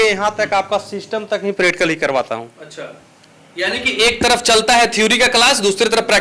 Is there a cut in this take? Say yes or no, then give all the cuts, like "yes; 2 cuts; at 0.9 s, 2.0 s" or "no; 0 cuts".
no; 0 cuts